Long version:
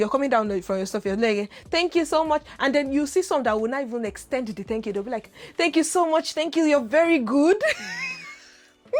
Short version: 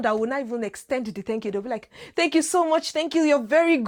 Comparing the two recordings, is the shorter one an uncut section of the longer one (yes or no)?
yes